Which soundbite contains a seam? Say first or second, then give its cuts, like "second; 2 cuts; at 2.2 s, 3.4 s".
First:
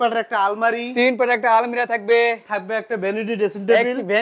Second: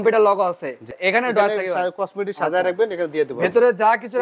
second; 1 cut; at 0.9 s